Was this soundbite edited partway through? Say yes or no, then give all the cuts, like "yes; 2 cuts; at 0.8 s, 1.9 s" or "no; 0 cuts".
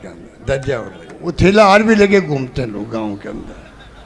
yes; 1 cut; at 1.2 s